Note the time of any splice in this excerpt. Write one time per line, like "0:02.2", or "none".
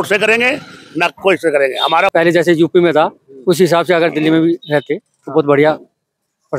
0:02.1